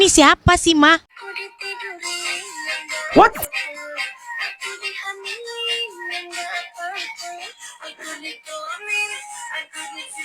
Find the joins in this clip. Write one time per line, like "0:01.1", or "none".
0:01.1